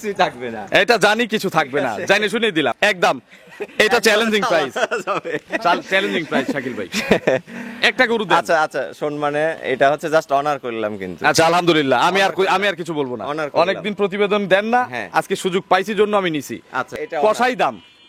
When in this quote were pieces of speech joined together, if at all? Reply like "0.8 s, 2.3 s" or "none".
2.8 s, 16.9 s